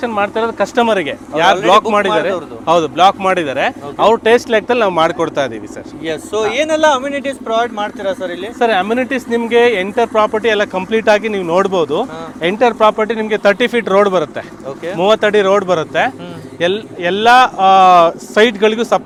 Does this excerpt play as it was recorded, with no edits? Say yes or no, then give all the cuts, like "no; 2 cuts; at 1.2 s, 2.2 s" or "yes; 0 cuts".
yes; 0 cuts